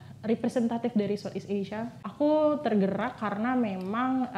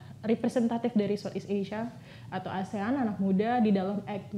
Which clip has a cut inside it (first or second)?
first